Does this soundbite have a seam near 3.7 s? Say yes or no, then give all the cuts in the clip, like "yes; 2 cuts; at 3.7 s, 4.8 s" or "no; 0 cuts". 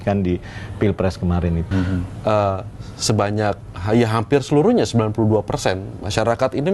no; 1 cut; at 1.7 s